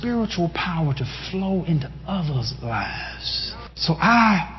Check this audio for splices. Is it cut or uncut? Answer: cut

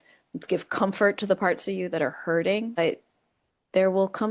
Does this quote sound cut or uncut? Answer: cut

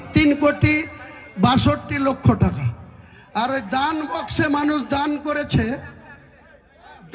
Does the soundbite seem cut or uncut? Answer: uncut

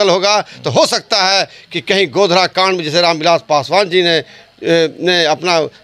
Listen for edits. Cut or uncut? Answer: uncut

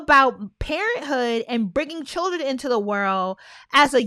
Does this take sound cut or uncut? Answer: uncut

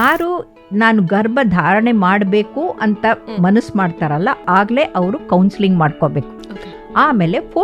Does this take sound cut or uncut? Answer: cut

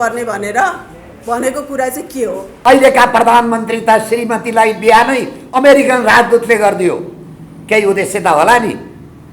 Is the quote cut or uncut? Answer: cut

